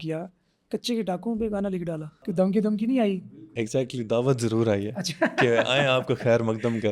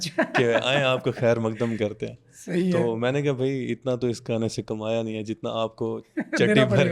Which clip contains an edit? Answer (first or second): first